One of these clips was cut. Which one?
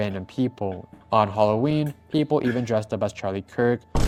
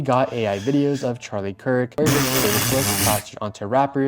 second; 1 cut; at 1.9 s

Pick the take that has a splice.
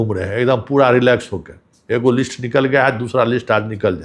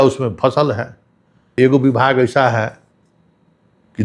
second; 1 cut; at 1.5 s

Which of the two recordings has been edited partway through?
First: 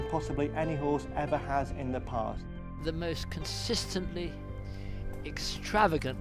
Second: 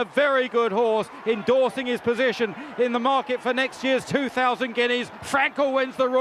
first; 1 cut; at 2.5 s

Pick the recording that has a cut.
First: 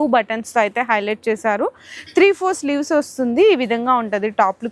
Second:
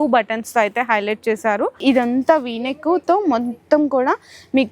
second; 1 cut; at 1.8 s

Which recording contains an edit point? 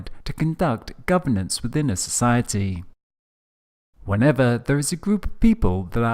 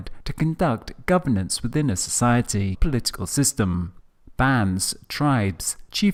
first; 1 cut; at 2.8 s

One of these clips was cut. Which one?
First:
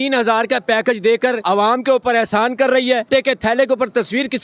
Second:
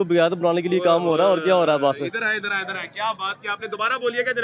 first; 2 cuts; at 1.4 s, 3.1 s

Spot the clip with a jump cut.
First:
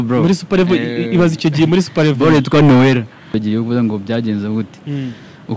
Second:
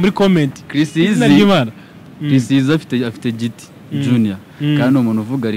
first; 1 cut; at 3.3 s

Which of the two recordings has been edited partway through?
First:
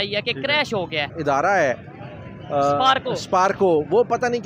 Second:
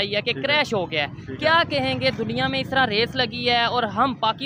first; 1 cut; at 1.1 s

